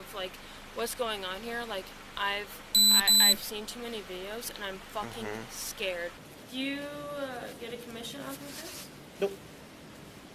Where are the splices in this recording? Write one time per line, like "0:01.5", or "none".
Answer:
0:06.3

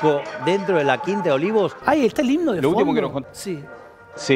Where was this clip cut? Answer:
0:01.8
0:03.2

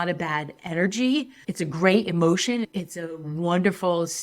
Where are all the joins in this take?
0:01.4
0:02.7

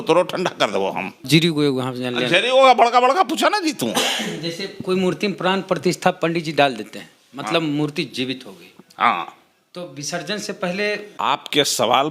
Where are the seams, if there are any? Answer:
0:01.2
0:11.1

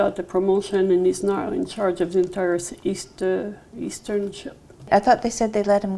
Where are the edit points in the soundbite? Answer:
0:04.9

